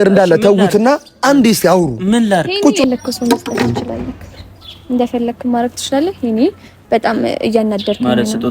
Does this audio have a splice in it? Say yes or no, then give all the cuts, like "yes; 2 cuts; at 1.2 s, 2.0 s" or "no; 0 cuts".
yes; 1 cut; at 2.8 s